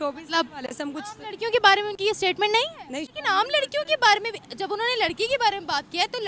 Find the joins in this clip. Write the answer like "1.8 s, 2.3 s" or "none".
3.1 s